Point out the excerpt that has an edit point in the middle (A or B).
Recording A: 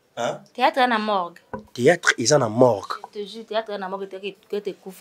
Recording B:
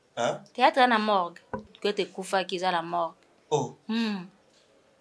B